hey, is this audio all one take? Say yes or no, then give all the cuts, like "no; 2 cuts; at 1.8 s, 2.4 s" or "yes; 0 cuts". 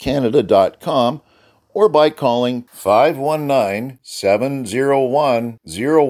yes; 0 cuts